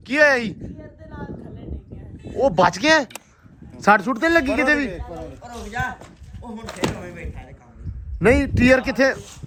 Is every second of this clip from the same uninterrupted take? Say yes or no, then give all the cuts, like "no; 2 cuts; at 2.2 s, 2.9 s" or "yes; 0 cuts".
yes; 0 cuts